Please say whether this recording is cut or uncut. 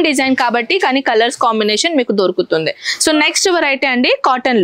uncut